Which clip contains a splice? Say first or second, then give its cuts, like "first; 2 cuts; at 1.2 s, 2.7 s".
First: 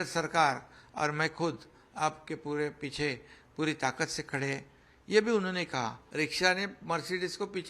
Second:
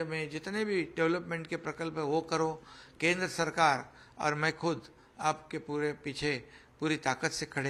first; 1 cut; at 6.0 s